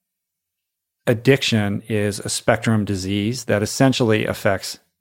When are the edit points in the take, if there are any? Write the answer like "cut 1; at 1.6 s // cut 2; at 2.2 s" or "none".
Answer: cut 1; at 1.8 s // cut 2; at 3.4 s